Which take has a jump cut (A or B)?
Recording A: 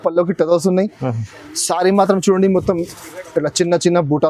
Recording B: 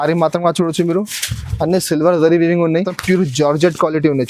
B